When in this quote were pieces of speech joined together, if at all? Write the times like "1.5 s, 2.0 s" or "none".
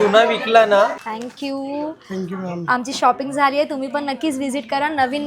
1.0 s